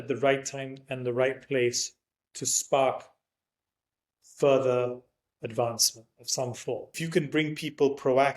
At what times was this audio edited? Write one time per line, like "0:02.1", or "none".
0:06.9